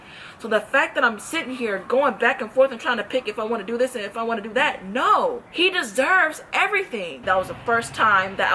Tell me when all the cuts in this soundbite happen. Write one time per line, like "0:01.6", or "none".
0:05.5
0:07.2